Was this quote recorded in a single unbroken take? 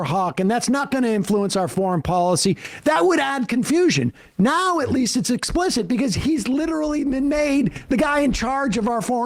yes; 0 cuts

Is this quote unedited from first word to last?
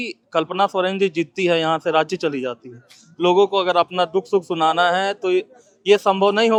yes; 0 cuts

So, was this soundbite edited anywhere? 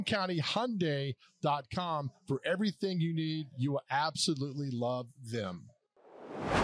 yes; 1 cut; at 5.5 s

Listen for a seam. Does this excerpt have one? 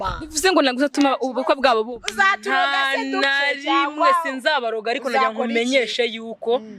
no; 0 cuts

